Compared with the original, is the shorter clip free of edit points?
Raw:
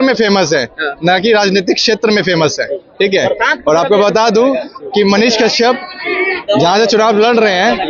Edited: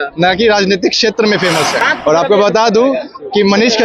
no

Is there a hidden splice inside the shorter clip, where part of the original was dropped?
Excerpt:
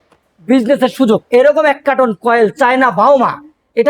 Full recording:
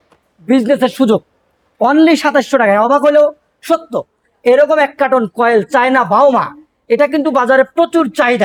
yes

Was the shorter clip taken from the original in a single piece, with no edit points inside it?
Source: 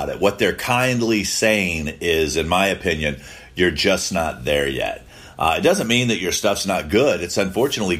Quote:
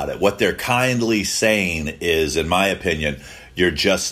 yes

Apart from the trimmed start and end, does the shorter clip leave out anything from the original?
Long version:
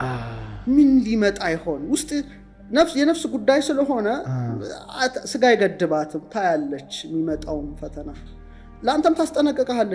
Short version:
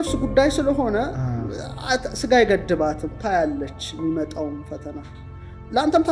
no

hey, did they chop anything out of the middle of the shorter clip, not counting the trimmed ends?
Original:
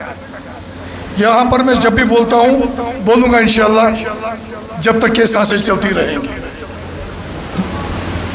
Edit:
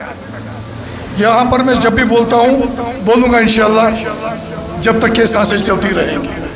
no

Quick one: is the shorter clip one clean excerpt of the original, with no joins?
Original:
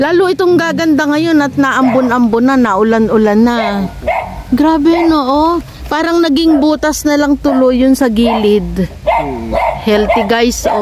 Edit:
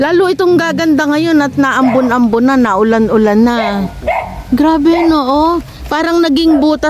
yes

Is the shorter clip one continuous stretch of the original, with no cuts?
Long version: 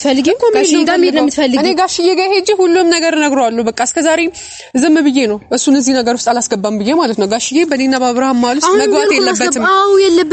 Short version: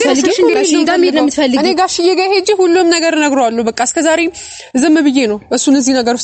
yes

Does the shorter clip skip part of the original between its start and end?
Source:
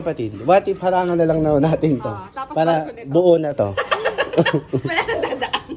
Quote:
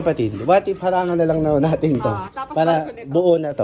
no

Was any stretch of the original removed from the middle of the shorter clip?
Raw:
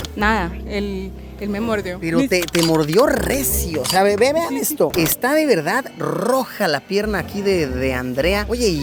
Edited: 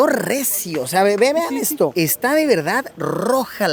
no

